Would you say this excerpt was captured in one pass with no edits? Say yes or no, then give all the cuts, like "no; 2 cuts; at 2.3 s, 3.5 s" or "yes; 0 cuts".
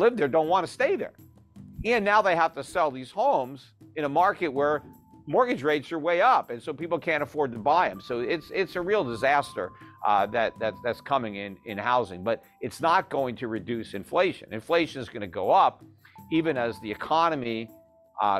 yes; 0 cuts